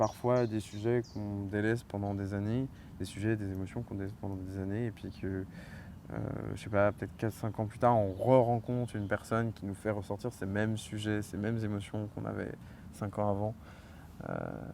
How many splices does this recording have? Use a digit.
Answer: 0